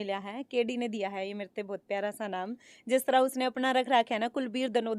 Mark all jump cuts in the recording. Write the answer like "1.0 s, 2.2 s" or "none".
none